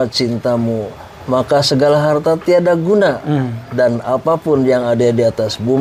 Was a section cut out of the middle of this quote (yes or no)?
no